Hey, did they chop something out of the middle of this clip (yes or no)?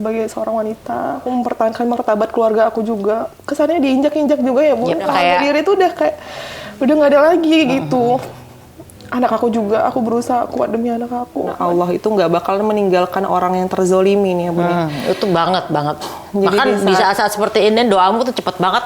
yes